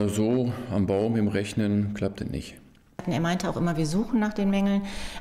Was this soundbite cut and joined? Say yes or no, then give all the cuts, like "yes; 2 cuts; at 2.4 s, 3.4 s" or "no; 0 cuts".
yes; 1 cut; at 3.0 s